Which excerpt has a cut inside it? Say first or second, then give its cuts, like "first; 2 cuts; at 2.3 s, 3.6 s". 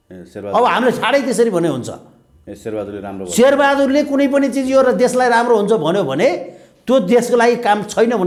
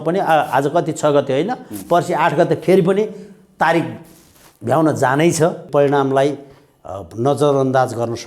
second; 1 cut; at 5.7 s